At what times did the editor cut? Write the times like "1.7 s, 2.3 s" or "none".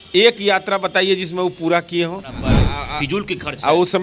2.6 s